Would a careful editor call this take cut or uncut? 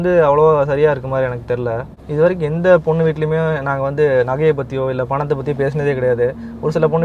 uncut